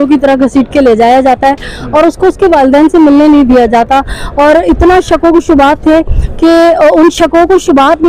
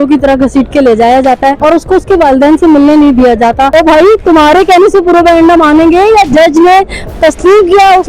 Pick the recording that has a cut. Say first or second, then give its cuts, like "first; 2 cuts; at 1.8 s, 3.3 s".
second; 2 cuts; at 1.6 s, 3.7 s